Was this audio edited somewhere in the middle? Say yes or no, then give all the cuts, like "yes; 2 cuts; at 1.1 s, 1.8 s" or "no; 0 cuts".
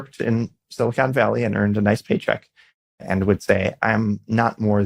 no; 0 cuts